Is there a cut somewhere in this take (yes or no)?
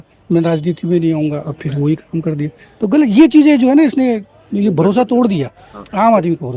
no